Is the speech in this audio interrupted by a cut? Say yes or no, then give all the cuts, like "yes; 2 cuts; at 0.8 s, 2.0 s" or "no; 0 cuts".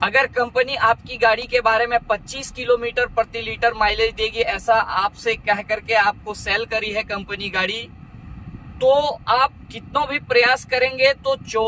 no; 0 cuts